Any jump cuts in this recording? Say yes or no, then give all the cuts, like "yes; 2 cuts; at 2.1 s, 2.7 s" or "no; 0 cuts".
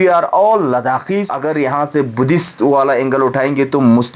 yes; 1 cut; at 1.3 s